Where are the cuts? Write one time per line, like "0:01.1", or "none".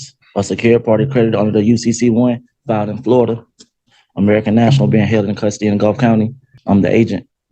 0:06.5